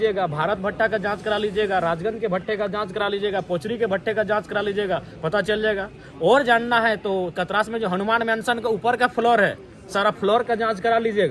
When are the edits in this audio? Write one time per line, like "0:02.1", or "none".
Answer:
none